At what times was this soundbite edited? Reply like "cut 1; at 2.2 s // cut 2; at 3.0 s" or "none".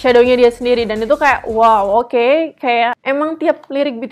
cut 1; at 3.0 s

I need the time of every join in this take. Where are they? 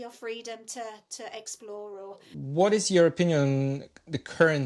cut 1; at 2.3 s

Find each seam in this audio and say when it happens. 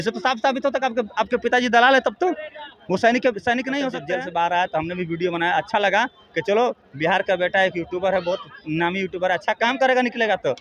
cut 1; at 4.0 s

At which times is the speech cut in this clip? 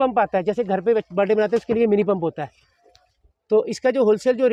none

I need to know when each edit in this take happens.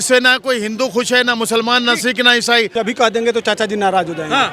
cut 1; at 2.7 s

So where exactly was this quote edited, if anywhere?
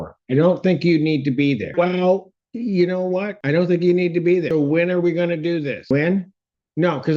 cut 1; at 1.7 s // cut 2; at 3.3 s // cut 3; at 4.5 s // cut 4; at 5.9 s

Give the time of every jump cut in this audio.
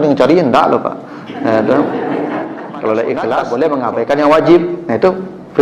cut 1; at 3.2 s

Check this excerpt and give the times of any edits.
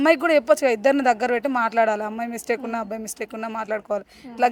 none

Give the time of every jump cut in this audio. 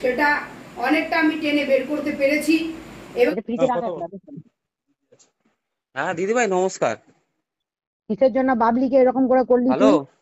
cut 1; at 3.3 s

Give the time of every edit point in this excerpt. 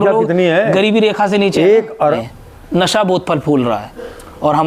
cut 1; at 2.1 s

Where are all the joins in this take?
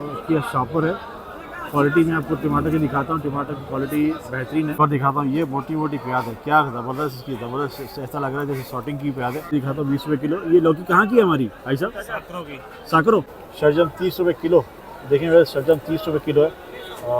cut 1; at 4.8 s // cut 2; at 9.5 s // cut 3; at 13.4 s

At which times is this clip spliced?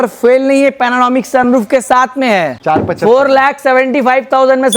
cut 1; at 2.5 s

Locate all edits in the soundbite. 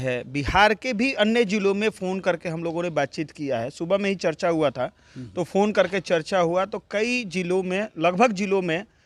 none

